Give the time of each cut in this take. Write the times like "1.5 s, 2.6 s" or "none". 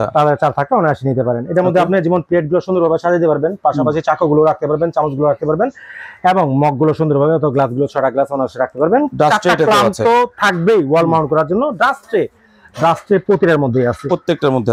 none